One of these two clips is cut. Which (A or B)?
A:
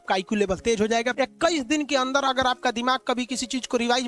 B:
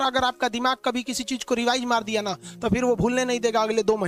A